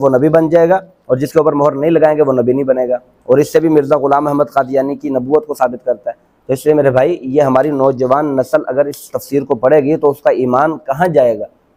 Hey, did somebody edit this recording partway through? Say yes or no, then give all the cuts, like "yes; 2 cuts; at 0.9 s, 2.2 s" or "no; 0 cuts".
no; 0 cuts